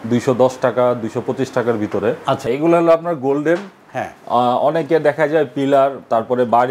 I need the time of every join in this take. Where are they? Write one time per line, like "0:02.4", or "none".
0:02.5

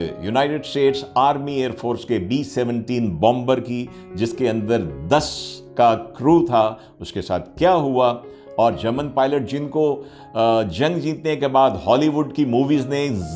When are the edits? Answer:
none

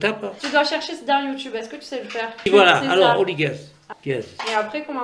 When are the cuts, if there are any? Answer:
0:02.3
0:03.9

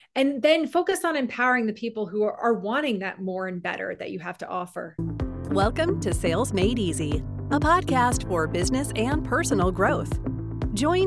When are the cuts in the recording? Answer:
0:05.4

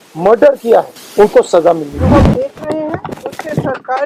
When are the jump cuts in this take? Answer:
0:01.0
0:02.2

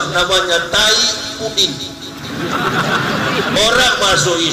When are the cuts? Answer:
0:03.6

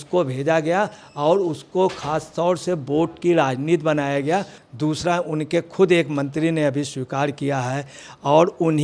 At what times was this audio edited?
0:04.6

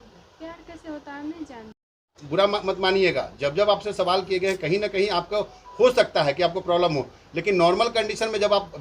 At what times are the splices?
0:02.1

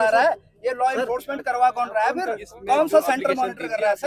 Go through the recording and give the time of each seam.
0:02.5

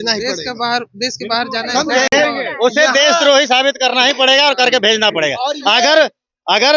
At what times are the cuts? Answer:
none

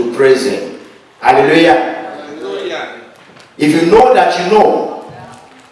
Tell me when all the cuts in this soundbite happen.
none

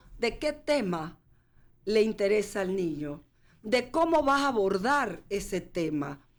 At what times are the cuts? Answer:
none

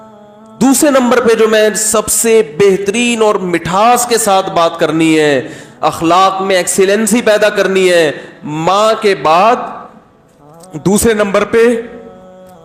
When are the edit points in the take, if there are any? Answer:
none

